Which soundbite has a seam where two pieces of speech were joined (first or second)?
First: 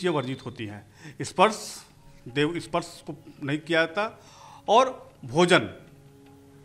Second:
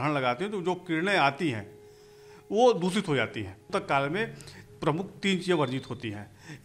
second